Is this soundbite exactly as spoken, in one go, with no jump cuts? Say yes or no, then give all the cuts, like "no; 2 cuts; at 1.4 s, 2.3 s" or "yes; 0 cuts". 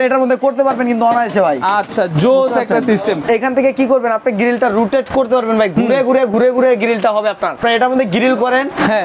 no; 2 cuts; at 3.2 s, 7.6 s